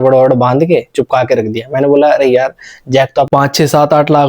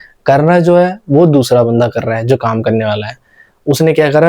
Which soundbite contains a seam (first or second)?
first